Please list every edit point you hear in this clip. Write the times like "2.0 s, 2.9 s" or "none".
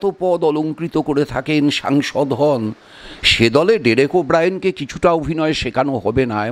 none